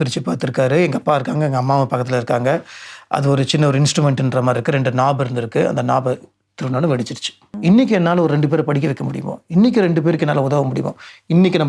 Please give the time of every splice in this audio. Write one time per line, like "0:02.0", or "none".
0:07.5